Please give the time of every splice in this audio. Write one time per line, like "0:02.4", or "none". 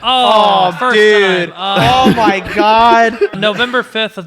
0:03.4